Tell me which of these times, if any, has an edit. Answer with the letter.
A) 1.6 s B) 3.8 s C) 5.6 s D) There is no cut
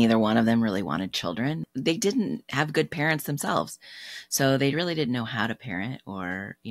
A